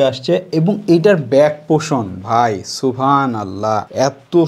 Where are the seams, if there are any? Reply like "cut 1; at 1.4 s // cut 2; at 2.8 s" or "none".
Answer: none